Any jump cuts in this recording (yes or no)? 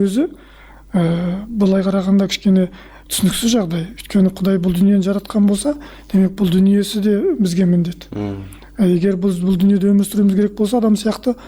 no